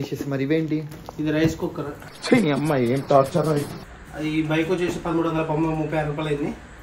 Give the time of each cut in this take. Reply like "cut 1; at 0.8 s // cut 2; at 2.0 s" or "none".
cut 1; at 3.9 s